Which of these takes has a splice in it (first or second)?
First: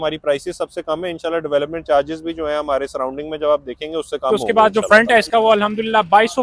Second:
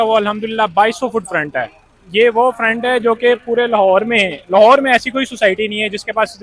first